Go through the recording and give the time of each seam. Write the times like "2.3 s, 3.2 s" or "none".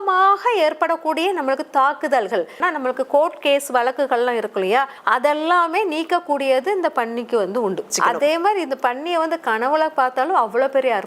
2.6 s, 5.0 s, 7.9 s